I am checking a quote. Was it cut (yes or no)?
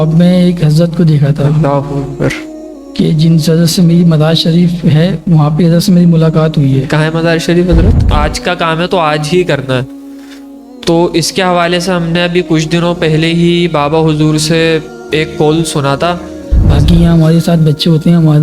yes